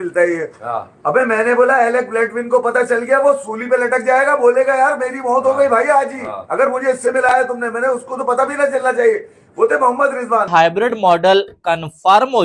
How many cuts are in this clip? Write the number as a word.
one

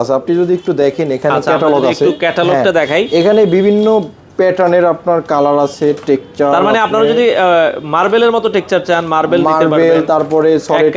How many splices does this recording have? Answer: zero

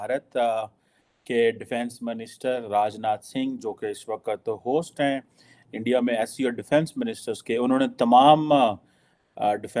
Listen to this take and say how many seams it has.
zero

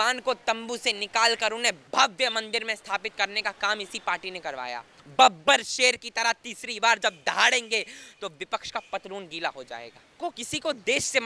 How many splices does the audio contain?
three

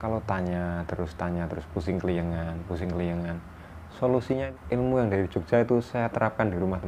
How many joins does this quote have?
one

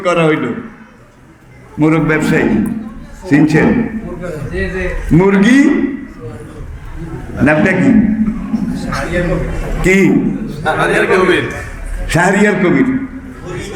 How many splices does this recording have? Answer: zero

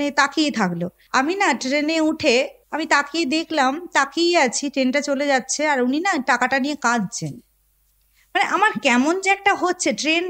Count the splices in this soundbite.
two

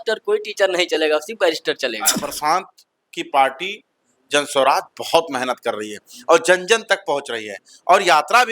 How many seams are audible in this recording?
one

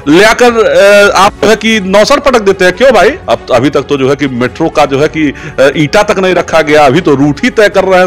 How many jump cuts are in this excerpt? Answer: one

